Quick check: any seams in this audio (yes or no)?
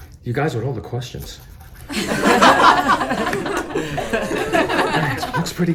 no